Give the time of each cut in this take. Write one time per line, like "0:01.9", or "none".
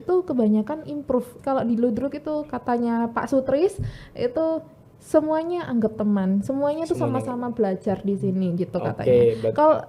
0:01.3